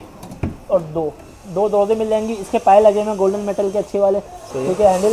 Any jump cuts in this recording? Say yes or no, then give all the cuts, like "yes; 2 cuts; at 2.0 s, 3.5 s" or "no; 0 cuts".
no; 0 cuts